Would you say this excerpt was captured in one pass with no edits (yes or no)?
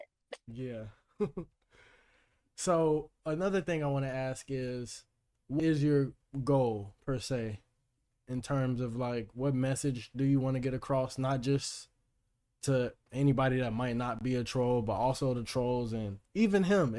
no